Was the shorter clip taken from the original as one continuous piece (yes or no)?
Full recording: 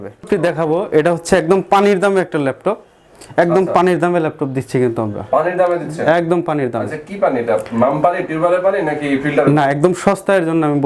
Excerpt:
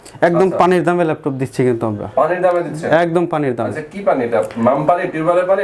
yes